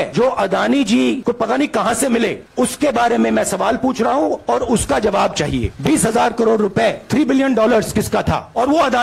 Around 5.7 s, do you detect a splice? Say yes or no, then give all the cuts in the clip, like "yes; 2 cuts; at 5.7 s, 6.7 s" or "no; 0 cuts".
yes; 2 cuts; at 1.2 s, 5.7 s